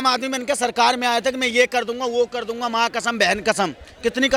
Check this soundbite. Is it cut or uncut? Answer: uncut